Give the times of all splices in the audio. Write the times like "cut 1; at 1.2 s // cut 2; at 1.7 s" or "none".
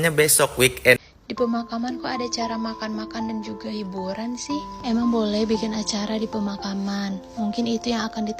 cut 1; at 1.0 s